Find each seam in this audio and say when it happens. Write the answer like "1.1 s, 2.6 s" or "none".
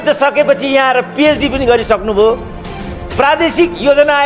none